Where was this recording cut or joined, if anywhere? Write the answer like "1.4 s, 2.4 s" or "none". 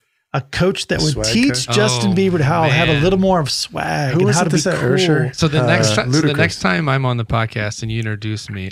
none